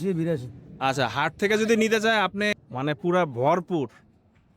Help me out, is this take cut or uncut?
cut